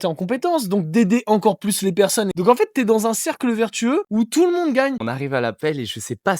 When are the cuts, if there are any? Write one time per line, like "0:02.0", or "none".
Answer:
0:02.3
0:04.1
0:05.0